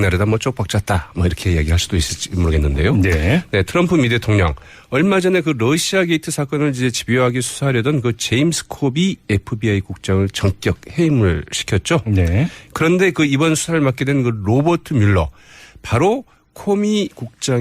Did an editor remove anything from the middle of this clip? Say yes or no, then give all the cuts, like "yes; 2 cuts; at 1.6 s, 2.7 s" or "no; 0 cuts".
yes; 1 cut; at 14.9 s